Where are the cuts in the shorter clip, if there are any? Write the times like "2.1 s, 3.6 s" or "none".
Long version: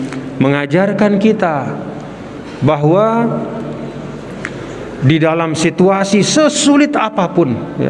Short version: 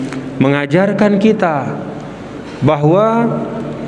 none